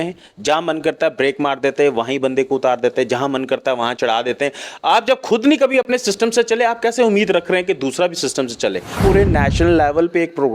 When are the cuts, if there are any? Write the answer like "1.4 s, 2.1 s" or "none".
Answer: 9.0 s